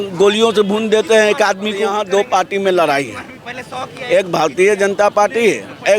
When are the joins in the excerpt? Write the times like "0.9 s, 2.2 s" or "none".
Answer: 2.1 s